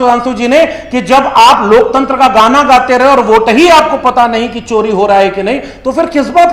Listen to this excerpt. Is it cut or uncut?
uncut